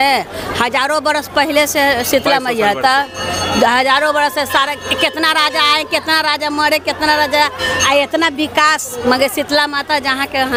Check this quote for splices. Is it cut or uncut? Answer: uncut